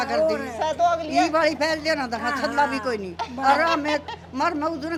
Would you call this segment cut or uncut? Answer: uncut